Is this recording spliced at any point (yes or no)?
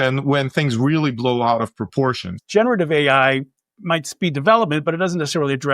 yes